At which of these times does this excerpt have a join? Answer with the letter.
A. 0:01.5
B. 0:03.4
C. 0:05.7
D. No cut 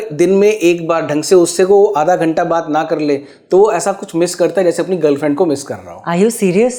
D